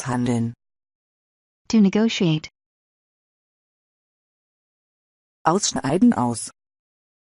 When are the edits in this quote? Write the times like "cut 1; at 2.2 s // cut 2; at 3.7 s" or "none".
cut 1; at 1.0 s